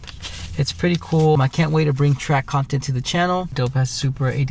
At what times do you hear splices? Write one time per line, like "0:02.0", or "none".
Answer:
0:01.4
0:03.5